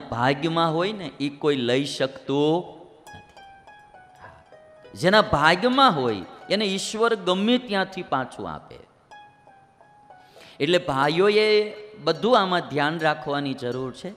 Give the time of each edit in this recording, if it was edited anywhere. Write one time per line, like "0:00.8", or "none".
none